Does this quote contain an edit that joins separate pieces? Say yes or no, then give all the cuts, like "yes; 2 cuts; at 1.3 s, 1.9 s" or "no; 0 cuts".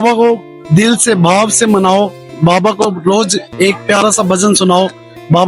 no; 0 cuts